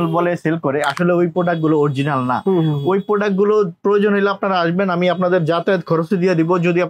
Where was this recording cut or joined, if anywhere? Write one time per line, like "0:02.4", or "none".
none